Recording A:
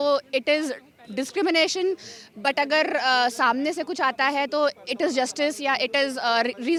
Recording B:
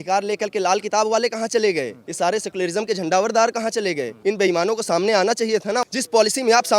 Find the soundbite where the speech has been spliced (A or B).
B